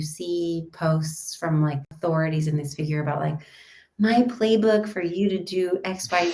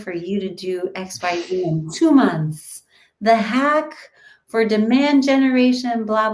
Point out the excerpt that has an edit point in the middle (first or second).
first